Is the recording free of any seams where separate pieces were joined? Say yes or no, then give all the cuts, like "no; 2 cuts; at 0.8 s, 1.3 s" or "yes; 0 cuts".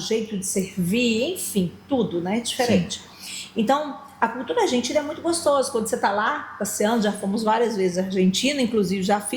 yes; 0 cuts